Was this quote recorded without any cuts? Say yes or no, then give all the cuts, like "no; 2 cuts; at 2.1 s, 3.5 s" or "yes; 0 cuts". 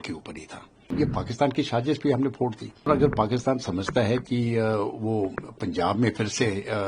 no; 2 cuts; at 0.9 s, 2.9 s